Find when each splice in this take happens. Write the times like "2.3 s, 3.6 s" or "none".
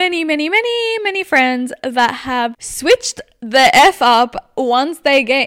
2.7 s